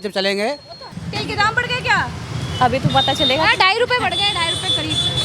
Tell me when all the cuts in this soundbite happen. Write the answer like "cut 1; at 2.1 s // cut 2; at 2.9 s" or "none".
cut 1; at 1.0 s